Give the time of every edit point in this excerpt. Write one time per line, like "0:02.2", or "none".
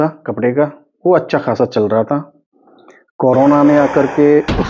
none